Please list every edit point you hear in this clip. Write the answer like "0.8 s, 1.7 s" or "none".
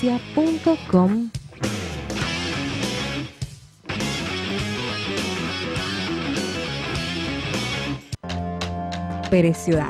8.1 s